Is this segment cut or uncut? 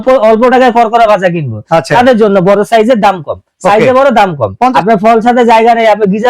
cut